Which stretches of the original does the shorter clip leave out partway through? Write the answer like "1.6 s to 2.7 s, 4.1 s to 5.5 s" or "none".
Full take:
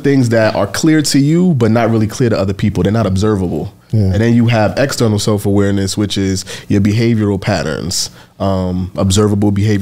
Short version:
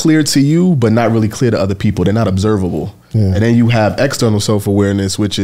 none